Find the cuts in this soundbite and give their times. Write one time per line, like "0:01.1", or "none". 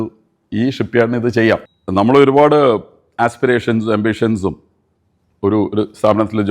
0:01.8